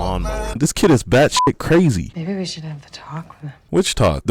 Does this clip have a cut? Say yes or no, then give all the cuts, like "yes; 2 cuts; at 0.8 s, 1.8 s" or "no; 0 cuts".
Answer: yes; 1 cut; at 2.1 s